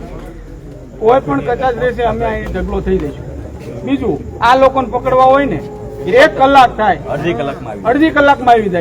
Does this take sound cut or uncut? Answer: uncut